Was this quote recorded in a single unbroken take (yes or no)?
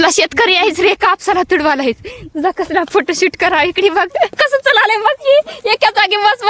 no